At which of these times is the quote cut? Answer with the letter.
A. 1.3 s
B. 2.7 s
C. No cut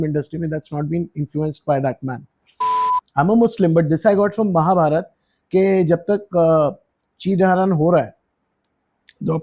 B